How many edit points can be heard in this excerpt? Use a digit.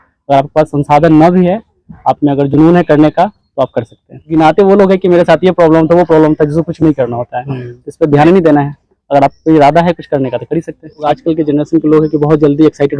2